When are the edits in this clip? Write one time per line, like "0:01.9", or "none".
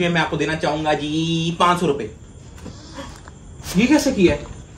0:03.5